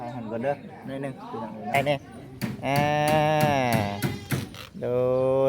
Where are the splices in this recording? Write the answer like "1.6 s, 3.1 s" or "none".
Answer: 1.8 s